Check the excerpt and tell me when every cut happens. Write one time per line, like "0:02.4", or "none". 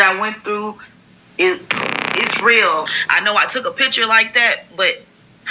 0:03.0